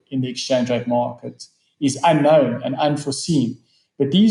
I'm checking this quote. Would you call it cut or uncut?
uncut